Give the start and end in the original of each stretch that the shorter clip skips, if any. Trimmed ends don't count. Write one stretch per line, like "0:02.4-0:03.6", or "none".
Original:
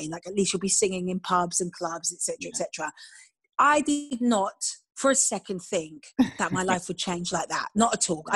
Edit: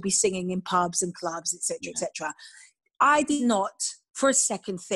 0:04.0-0:04.2